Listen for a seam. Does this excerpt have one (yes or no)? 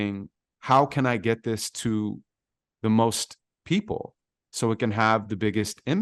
no